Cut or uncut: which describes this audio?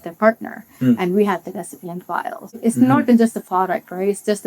cut